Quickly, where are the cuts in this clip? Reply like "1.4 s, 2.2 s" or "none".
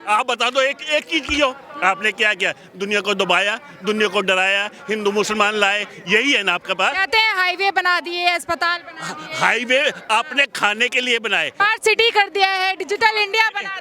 11.5 s